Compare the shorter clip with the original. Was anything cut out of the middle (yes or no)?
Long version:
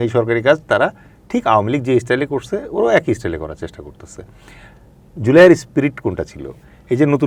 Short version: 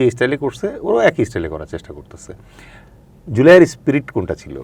no